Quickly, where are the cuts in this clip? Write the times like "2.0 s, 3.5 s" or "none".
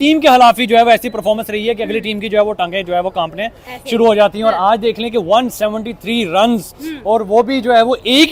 none